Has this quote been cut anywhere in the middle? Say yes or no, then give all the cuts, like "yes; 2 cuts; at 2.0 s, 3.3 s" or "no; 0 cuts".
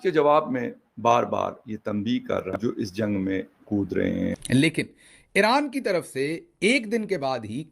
yes; 2 cuts; at 2.6 s, 4.3 s